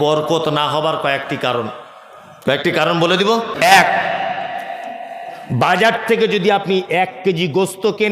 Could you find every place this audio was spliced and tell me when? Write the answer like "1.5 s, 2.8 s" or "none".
3.5 s